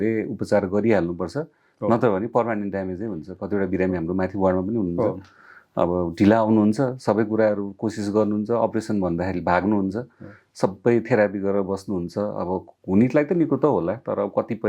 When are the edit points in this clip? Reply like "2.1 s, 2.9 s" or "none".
none